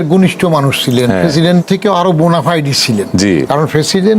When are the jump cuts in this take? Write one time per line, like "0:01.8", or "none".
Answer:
0:01.6